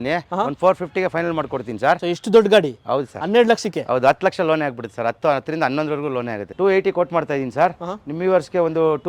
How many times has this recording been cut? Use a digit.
2